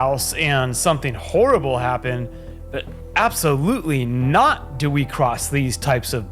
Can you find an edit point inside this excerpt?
no; 0 cuts

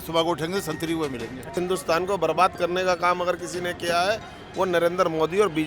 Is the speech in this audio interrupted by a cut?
yes; 1 cut; at 1.6 s

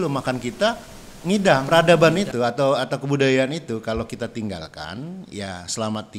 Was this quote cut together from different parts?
yes; 1 cut; at 1.6 s

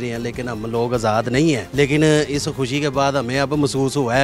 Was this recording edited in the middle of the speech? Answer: yes; 1 cut; at 1.7 s

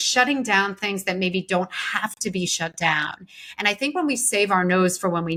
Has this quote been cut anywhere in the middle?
no; 0 cuts

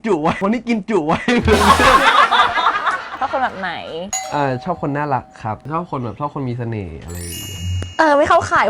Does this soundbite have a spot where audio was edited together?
yes; 2 cuts; at 3.2 s, 7.8 s

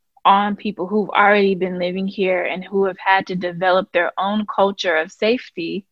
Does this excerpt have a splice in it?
no; 0 cuts

